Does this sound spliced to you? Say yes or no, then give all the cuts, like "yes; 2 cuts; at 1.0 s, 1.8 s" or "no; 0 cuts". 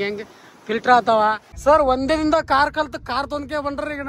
yes; 1 cut; at 1.5 s